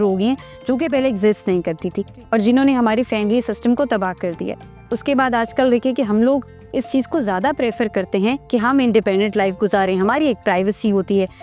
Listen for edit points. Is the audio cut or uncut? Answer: uncut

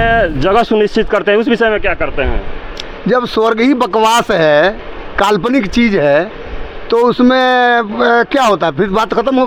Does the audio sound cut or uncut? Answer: uncut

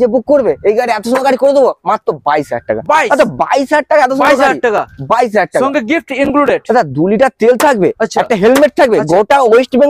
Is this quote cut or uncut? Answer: uncut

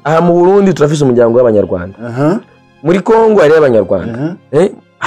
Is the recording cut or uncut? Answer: uncut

